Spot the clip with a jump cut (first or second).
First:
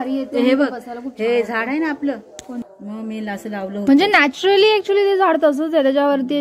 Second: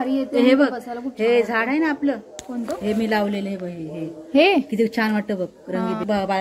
first